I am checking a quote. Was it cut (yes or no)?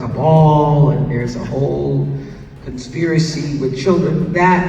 no